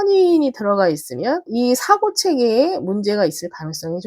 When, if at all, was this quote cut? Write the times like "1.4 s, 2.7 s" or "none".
1.5 s